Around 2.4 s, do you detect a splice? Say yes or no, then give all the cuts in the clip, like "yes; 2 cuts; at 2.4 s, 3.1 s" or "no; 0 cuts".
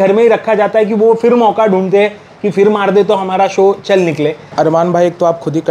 no; 1 cut; at 4.4 s